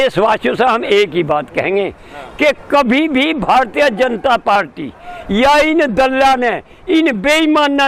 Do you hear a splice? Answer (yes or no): no